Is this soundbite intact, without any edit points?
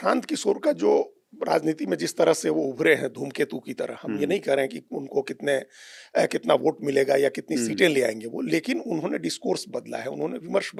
yes; 0 cuts

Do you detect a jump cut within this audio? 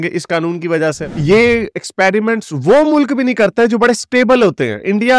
yes; 1 cut; at 1.1 s

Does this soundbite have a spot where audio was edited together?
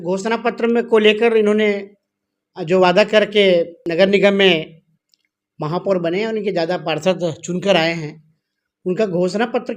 yes; 1 cut; at 3.8 s

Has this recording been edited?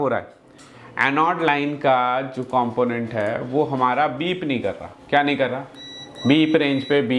no; 0 cuts

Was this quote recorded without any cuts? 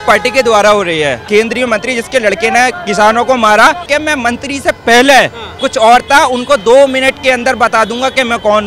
no; 2 cuts; at 1.2 s, 3.9 s

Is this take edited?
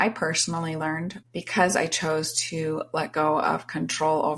yes; 1 cut; at 1.2 s

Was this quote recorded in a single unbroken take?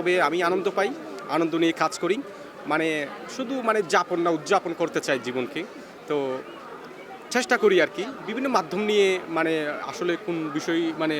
yes; 0 cuts

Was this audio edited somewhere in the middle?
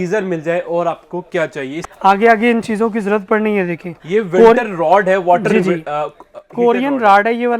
yes; 1 cut; at 1.8 s

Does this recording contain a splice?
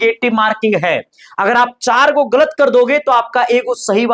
no; 0 cuts

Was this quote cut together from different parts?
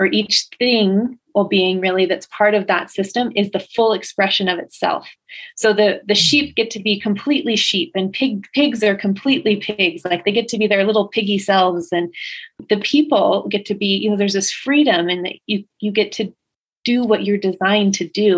yes; 1 cut; at 12.6 s

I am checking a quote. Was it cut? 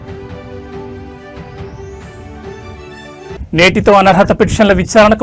no; 0 cuts

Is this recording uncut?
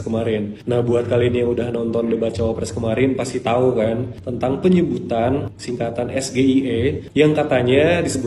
yes; 0 cuts

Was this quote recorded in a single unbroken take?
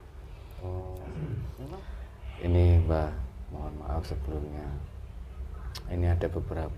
no; 1 cut; at 1.0 s

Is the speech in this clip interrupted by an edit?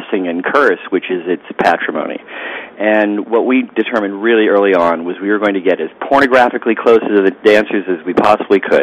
no; 0 cuts

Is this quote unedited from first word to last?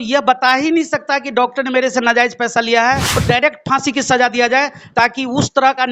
no; 1 cut; at 3.2 s

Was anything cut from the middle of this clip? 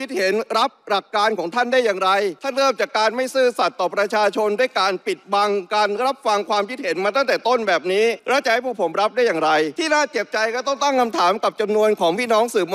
yes; 3 cuts; at 2.4 s, 8.2 s, 9.8 s

